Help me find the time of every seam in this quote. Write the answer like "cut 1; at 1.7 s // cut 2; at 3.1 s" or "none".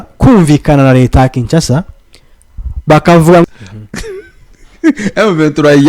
cut 1; at 3.5 s